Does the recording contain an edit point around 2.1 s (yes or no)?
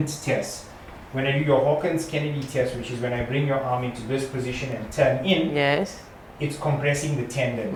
no